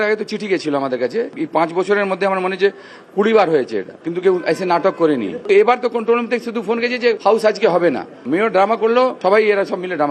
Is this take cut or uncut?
cut